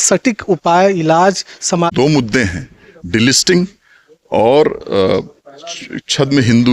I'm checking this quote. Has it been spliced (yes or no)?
yes